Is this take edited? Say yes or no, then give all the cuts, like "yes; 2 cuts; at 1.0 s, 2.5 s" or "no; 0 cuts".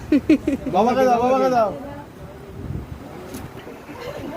yes; 1 cut; at 3.5 s